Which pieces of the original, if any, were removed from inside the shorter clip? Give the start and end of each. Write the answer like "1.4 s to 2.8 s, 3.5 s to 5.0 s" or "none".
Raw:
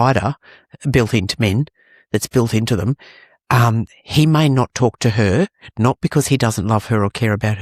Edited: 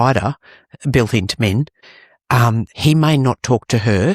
2.4 s to 3.7 s